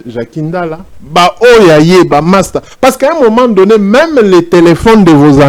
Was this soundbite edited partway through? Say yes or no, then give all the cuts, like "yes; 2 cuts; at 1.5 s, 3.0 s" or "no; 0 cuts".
no; 0 cuts